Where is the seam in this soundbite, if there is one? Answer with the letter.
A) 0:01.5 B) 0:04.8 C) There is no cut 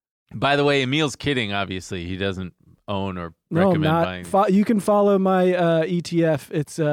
C